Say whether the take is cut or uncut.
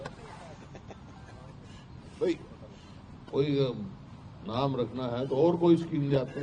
uncut